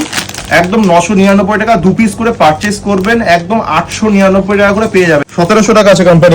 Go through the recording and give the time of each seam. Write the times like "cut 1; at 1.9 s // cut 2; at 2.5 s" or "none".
cut 1; at 5.3 s